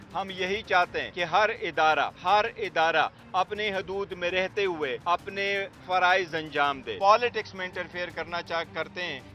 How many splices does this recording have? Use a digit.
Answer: 4